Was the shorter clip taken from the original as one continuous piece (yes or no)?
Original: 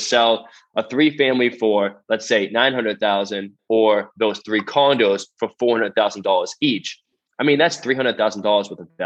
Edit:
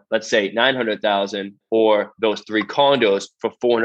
yes